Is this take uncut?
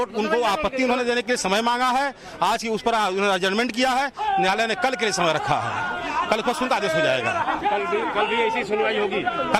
yes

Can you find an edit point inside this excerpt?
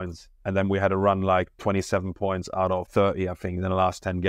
yes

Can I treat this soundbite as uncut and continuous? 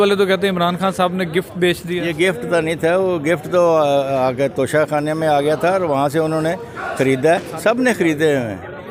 yes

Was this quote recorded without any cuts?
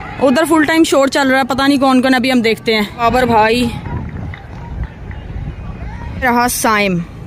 no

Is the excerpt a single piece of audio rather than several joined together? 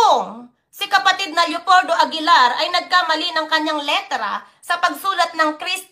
yes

